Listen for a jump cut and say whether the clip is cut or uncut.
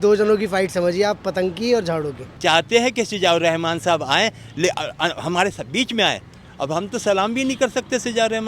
cut